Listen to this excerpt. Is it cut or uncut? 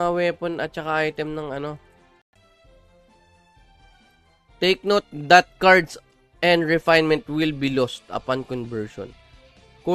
cut